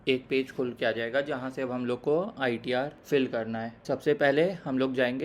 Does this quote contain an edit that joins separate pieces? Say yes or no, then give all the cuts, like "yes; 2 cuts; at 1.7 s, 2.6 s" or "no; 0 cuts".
yes; 2 cuts; at 3.0 s, 3.8 s